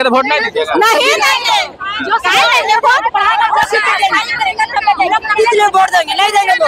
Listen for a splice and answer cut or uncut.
uncut